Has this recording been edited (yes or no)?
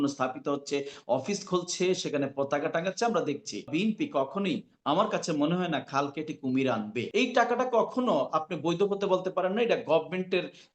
yes